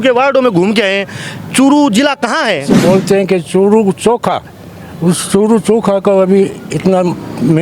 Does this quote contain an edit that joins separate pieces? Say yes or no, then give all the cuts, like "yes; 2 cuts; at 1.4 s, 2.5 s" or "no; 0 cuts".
yes; 1 cut; at 2.7 s